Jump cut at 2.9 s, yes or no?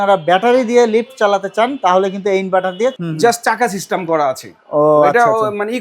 yes